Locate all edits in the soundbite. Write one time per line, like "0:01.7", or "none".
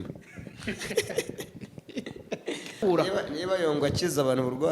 0:02.8